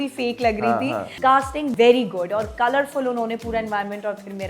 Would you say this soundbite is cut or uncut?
cut